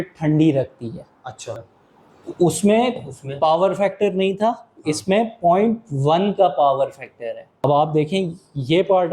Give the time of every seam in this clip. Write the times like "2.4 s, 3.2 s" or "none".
1.6 s, 7.6 s